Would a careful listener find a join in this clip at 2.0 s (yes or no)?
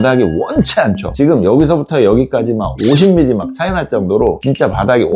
no